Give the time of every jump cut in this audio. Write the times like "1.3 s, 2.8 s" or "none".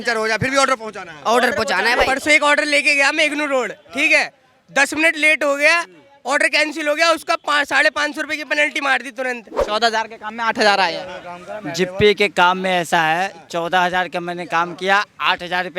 2.1 s, 9.6 s